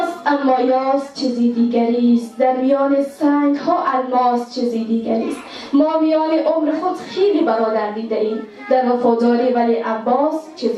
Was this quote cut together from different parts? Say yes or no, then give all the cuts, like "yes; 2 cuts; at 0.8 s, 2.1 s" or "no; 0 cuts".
no; 0 cuts